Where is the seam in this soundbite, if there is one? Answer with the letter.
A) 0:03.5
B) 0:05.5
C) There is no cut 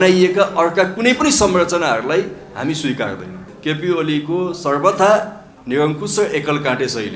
A